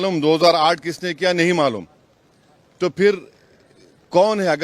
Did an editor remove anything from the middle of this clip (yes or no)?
no